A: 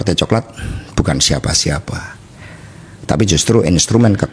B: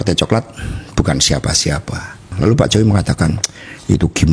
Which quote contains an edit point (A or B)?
B